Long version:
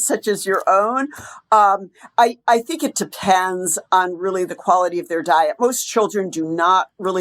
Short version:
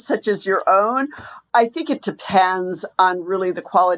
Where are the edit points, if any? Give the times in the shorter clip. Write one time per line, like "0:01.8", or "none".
0:01.4